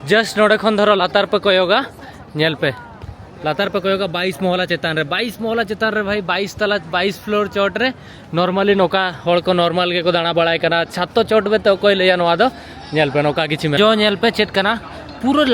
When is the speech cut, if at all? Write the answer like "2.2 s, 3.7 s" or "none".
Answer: 13.8 s